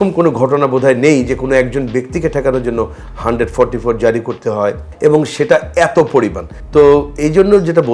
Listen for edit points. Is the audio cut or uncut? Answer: uncut